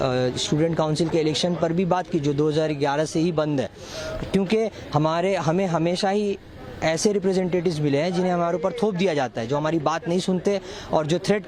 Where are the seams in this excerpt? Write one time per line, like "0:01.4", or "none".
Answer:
none